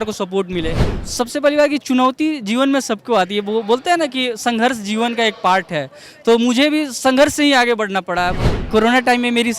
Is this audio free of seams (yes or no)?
no